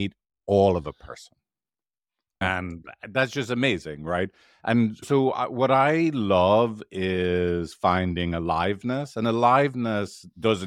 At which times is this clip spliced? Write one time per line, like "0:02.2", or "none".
0:02.4